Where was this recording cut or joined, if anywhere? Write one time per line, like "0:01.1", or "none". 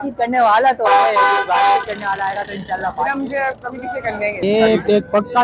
0:04.4